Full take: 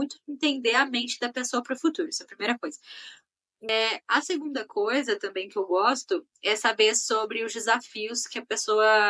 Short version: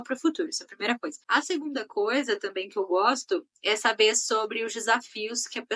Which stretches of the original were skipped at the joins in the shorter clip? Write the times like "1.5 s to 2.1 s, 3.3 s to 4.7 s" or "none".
2.8 s to 4.0 s